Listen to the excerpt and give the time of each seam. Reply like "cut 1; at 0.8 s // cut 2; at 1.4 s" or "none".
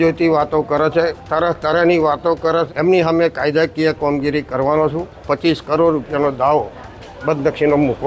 cut 1; at 2.7 s // cut 2; at 5.1 s